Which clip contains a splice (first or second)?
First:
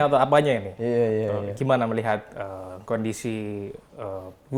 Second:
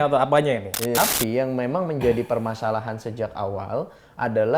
second